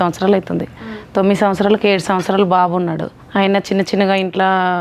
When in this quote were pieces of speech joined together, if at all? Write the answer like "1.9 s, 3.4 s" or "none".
3.1 s